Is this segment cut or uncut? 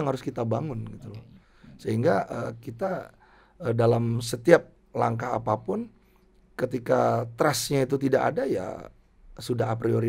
uncut